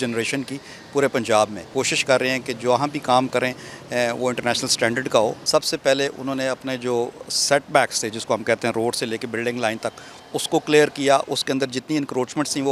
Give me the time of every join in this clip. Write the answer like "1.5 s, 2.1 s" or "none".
1.6 s, 5.4 s